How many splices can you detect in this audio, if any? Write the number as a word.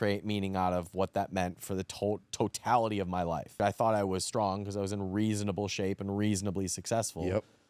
one